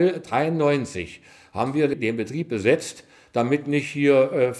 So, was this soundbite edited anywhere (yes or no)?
yes